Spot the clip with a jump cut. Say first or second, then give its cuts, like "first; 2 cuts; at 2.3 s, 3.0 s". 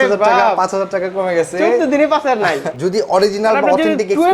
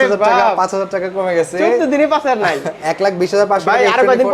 first; 1 cut; at 2.7 s